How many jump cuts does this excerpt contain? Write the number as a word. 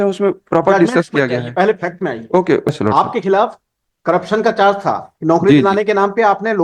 one